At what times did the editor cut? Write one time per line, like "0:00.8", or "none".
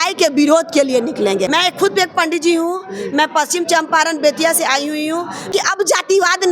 0:01.5
0:05.5